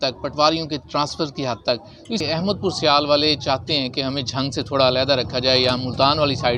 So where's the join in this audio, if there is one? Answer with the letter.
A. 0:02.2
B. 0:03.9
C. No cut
A